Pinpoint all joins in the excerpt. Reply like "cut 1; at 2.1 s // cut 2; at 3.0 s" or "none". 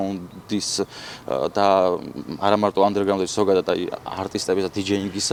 none

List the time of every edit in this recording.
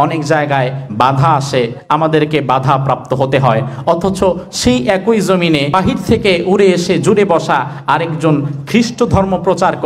cut 1; at 5.7 s

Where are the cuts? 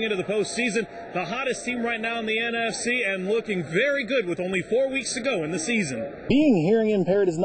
cut 1; at 6.3 s

